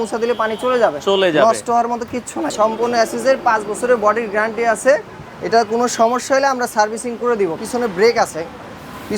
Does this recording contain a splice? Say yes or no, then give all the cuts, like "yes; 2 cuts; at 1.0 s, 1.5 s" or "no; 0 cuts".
yes; 2 cuts; at 2.5 s, 7.5 s